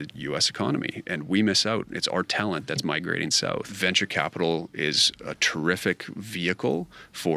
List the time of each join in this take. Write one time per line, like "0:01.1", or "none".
0:03.7